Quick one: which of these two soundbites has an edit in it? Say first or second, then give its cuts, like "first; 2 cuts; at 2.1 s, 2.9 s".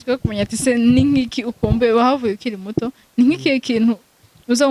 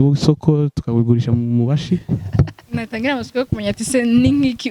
second; 1 cut; at 2.2 s